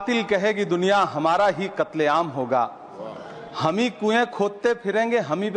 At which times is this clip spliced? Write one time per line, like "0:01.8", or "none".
none

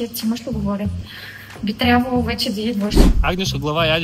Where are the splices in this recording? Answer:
0:03.0

